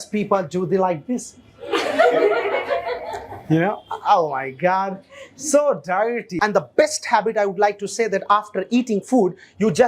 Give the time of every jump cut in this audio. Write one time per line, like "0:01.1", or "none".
0:06.3